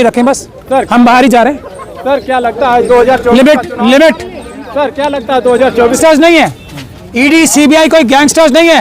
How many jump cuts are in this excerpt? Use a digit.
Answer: 1